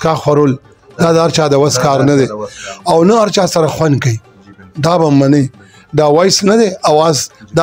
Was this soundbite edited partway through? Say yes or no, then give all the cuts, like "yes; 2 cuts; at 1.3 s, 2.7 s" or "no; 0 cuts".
no; 0 cuts